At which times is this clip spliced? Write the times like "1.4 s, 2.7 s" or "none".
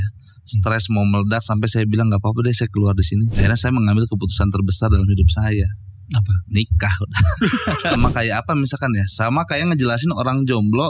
3.4 s, 8.0 s